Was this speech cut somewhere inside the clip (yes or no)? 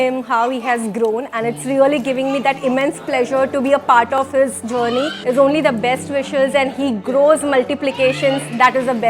yes